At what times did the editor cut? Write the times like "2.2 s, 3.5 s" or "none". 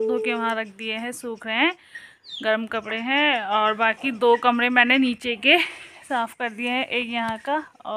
none